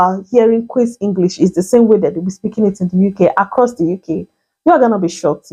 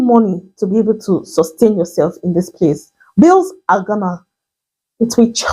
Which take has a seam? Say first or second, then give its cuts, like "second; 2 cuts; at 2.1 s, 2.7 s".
second; 1 cut; at 2.9 s